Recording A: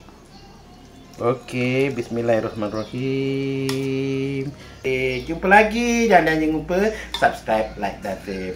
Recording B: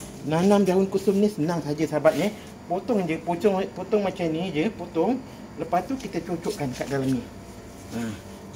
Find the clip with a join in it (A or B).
A